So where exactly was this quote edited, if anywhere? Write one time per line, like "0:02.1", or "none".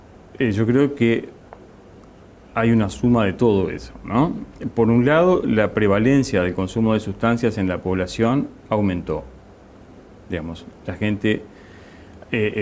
0:04.8